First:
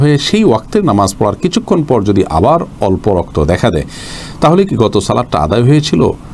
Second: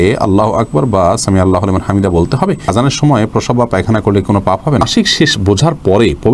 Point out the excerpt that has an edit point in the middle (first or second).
second